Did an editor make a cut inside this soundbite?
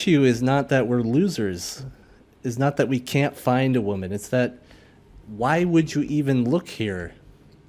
no; 0 cuts

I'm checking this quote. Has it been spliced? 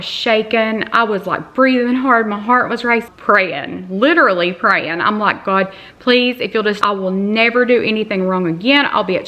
yes; 2 cuts; at 3.1 s, 6.8 s

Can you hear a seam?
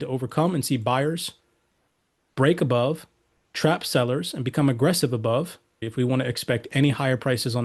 yes; 1 cut; at 5.9 s

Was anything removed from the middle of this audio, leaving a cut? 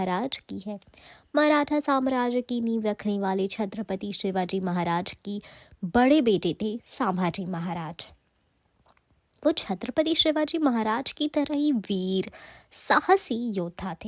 no; 0 cuts

